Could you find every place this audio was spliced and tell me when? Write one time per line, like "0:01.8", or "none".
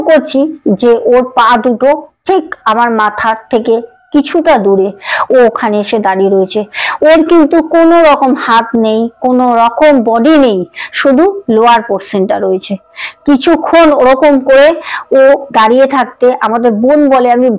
none